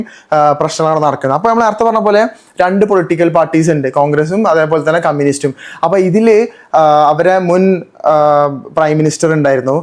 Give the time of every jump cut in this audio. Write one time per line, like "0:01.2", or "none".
none